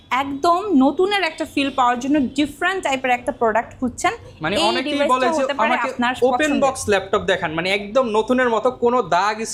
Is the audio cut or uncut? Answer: uncut